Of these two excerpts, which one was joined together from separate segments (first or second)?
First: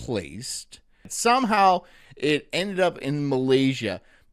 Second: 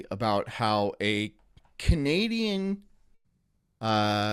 first